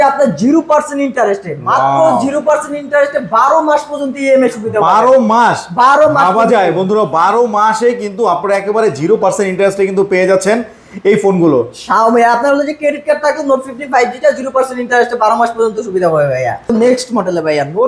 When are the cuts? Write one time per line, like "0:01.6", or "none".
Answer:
none